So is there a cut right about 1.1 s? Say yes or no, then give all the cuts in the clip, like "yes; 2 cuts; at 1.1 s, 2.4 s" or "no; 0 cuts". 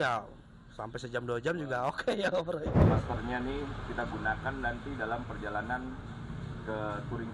no; 1 cut; at 2.8 s